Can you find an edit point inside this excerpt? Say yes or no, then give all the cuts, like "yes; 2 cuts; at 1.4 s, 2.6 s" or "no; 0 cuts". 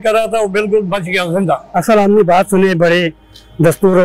yes; 1 cut; at 1.7 s